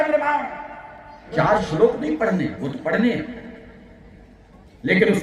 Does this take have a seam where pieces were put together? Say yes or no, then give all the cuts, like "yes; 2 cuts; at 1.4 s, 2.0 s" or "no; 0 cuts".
yes; 1 cut; at 1.3 s